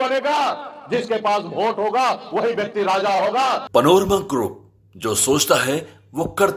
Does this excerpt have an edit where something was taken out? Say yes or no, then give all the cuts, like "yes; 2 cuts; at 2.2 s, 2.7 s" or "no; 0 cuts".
yes; 1 cut; at 3.6 s